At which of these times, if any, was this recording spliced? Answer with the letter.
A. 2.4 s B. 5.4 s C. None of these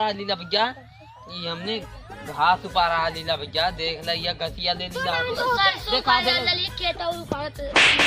B